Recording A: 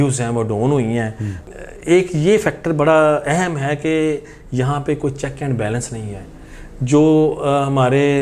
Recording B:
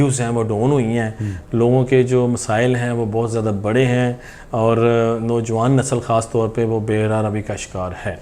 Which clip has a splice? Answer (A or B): A